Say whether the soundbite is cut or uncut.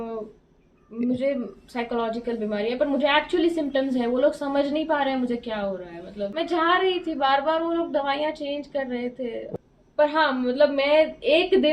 cut